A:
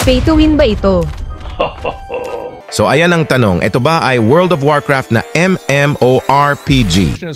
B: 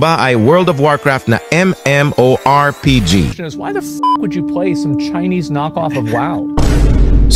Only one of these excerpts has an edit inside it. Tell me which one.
A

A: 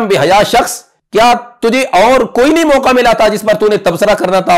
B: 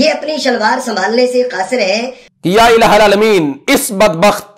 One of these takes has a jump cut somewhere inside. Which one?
B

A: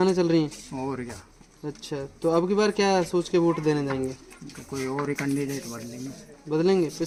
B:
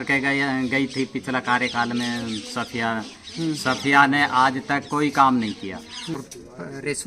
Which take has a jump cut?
B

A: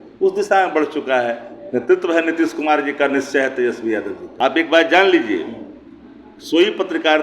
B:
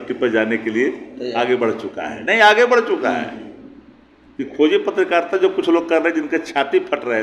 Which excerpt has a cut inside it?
A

